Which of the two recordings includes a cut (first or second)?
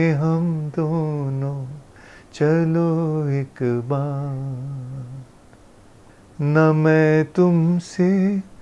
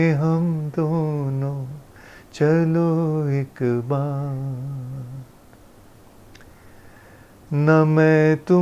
first